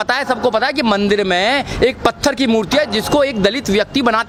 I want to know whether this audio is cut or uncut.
uncut